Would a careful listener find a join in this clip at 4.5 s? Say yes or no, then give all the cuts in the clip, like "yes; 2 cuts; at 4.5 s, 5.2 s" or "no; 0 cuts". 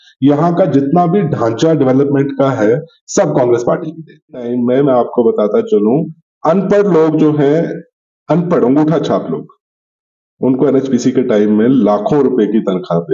yes; 1 cut; at 4.5 s